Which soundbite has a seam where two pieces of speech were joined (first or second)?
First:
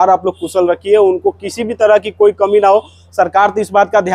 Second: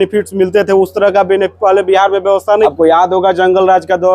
second